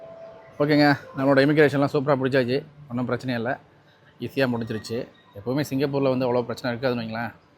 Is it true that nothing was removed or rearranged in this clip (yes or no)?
yes